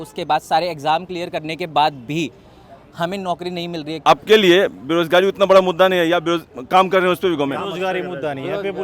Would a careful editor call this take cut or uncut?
cut